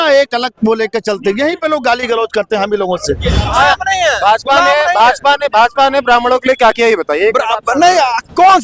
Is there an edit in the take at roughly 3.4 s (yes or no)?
yes